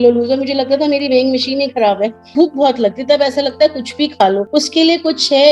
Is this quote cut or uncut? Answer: cut